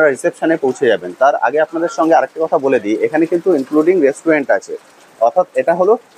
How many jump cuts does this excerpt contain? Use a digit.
0